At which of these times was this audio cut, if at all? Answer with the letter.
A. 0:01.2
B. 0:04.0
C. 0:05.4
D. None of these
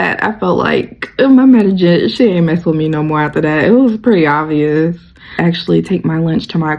C